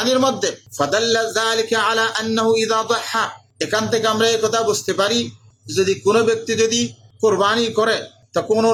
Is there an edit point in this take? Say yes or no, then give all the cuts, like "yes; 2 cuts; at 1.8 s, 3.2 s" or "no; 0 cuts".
no; 0 cuts